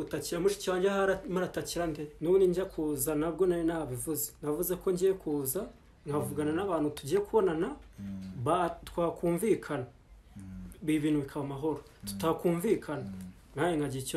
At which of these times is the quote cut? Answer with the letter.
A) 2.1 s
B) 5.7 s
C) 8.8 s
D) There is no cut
A